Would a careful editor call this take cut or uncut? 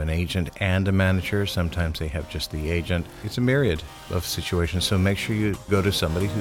cut